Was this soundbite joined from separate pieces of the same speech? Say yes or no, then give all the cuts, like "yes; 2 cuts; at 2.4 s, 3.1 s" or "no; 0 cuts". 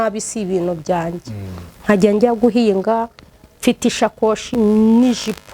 yes; 1 cut; at 4.5 s